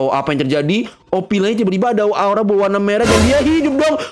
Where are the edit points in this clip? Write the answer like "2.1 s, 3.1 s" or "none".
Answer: none

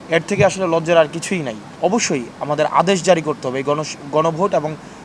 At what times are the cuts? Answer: 1.6 s

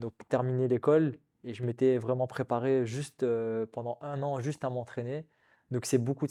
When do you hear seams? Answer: none

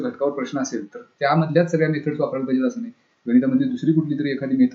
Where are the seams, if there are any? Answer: none

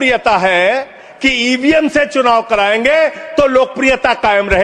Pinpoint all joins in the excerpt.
1.0 s

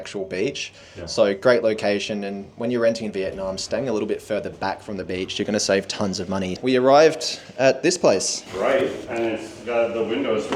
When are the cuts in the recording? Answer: 6.6 s, 8.4 s

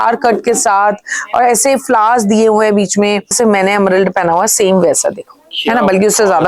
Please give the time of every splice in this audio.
3.3 s

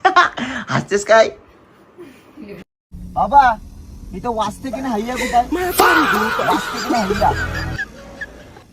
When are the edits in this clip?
2.6 s

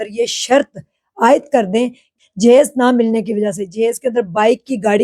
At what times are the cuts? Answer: 2.1 s

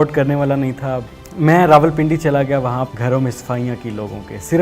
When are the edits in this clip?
1.0 s, 2.9 s

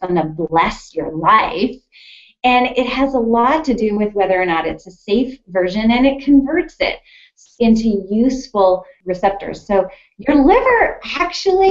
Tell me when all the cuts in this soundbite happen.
9.0 s

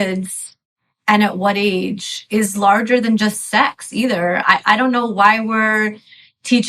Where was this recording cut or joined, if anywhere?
none

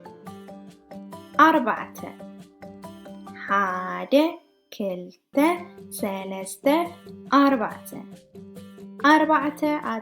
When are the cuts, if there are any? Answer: 1.4 s

